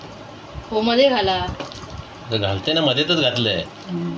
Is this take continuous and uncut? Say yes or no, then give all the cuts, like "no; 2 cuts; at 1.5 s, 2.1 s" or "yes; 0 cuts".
yes; 0 cuts